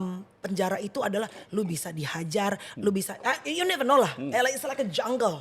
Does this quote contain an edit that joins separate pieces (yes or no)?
no